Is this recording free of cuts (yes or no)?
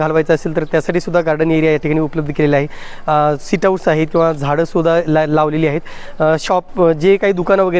yes